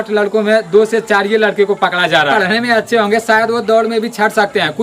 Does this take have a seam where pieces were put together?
yes; 1 cut; at 2.3 s

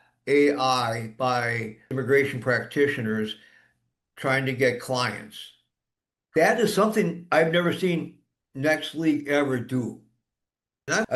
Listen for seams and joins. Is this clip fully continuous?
yes; 0 cuts

